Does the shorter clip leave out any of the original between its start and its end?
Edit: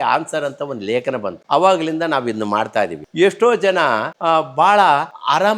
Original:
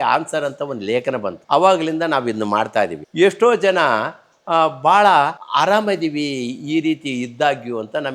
yes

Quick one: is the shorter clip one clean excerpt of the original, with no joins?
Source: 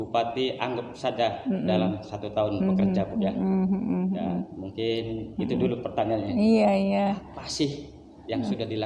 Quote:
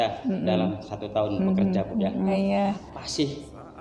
no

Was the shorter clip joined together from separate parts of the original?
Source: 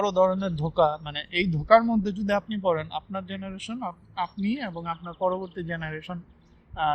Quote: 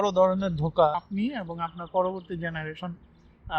yes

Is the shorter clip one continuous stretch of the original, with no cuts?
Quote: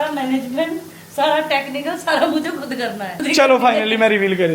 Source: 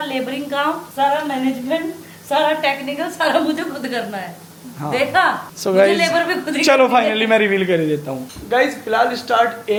no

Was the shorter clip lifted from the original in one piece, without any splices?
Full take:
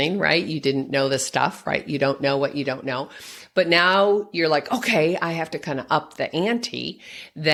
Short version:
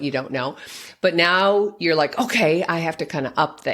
yes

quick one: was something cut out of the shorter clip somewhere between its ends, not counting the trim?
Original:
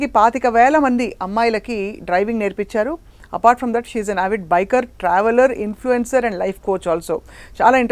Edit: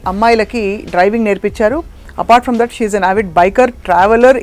no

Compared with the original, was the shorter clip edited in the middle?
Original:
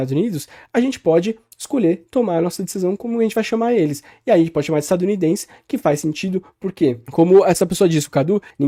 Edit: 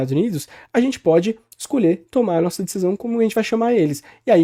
no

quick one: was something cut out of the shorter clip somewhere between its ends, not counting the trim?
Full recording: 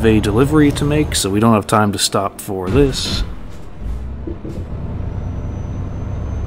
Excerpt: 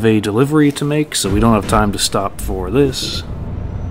yes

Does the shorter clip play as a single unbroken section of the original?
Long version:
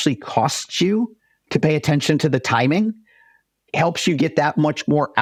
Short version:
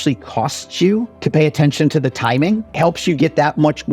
no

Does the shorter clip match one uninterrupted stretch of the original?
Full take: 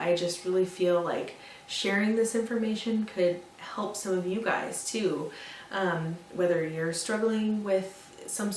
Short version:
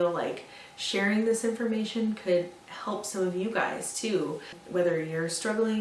no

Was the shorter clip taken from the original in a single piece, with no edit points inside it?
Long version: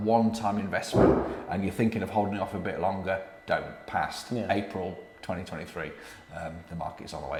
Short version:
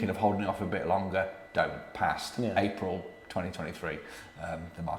yes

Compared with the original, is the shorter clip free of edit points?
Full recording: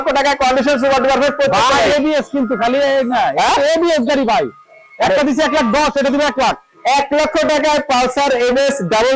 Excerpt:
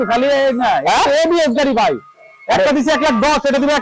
yes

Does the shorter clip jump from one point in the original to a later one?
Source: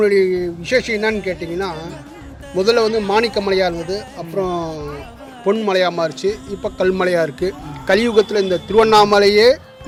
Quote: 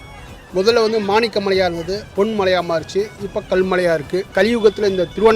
yes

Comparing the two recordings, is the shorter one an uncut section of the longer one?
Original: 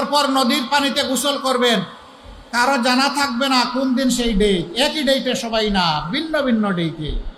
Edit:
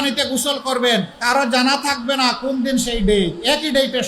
no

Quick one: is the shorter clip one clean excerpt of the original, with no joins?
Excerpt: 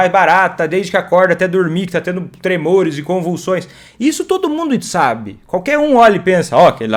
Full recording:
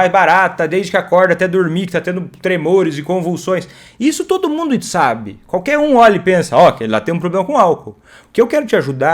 yes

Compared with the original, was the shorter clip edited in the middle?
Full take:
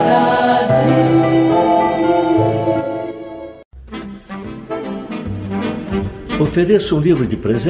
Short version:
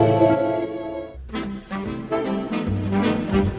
yes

